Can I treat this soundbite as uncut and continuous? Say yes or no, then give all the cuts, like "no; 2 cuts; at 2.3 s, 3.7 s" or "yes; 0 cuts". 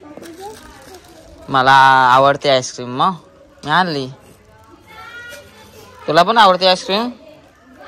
yes; 0 cuts